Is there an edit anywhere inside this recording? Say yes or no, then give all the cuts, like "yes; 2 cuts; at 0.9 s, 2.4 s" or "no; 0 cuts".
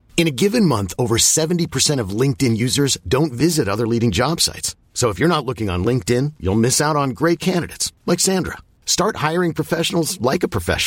no; 0 cuts